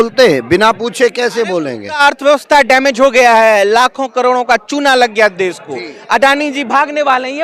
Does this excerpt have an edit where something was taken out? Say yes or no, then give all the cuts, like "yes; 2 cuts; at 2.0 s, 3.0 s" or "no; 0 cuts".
yes; 1 cut; at 2.0 s